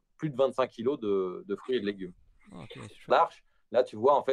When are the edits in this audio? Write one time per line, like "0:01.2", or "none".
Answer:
0:03.1